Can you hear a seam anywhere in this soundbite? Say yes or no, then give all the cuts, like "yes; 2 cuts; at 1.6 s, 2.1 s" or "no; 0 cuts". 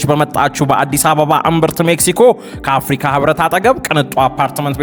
no; 0 cuts